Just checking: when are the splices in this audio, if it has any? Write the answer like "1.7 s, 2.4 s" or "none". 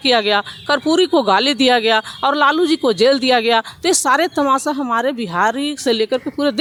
none